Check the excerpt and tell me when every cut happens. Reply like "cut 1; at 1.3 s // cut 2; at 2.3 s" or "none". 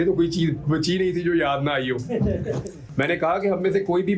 cut 1; at 2.8 s